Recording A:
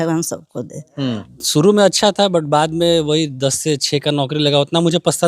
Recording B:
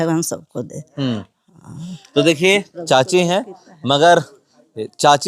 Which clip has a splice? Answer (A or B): A